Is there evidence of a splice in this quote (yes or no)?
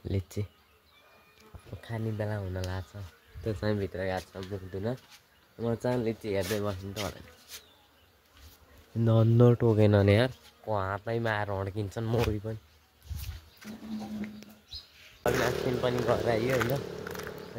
no